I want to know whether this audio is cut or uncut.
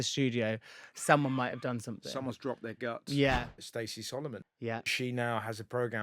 cut